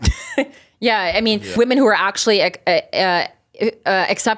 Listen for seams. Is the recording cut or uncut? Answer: cut